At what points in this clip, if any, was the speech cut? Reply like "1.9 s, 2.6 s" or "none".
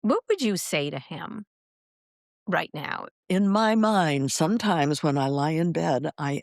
3.2 s